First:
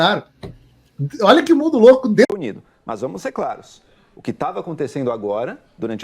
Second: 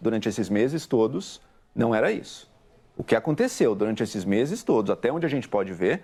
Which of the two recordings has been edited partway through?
first; 1 cut; at 2.3 s

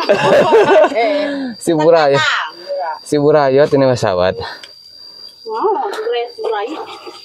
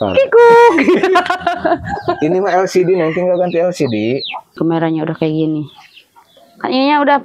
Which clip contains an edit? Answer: second; 1 cut; at 4.5 s

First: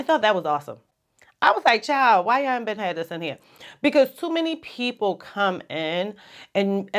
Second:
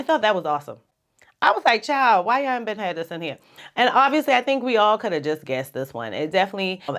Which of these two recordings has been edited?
second; 1 cut; at 3.7 s

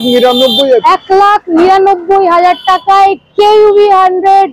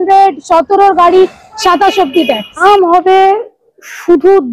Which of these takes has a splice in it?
second; 1 cut; at 2.6 s

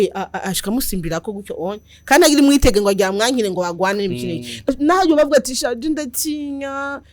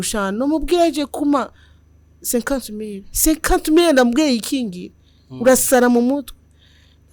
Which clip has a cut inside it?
first; 1 cut; at 4.7 s

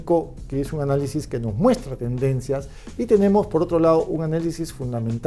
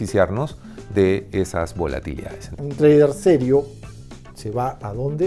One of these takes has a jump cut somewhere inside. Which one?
second; 1 cut; at 2.5 s

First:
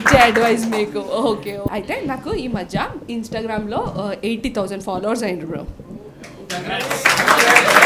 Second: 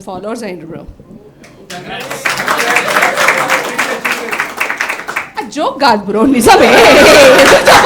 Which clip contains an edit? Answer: first; 1 cut; at 1.7 s

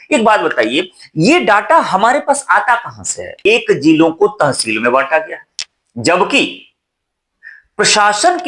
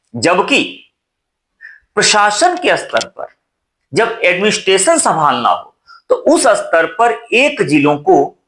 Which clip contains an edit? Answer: first; 1 cut; at 3.3 s

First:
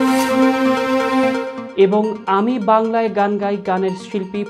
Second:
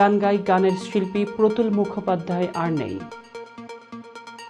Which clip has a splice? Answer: first; 1 cut; at 1.6 s

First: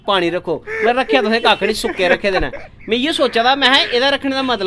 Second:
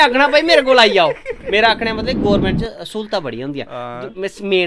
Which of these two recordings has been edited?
second; 1 cut; at 1.4 s

